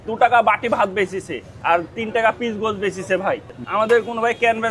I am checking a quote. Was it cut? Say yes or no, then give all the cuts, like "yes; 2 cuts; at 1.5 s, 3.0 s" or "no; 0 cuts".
no; 0 cuts